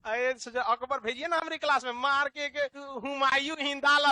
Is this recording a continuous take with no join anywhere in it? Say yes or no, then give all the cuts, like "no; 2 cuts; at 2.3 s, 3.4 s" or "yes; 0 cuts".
no; 1 cut; at 2.8 s